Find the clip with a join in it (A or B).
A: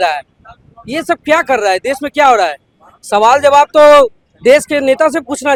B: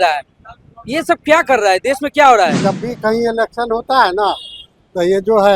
B